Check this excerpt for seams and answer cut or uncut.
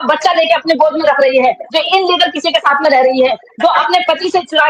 uncut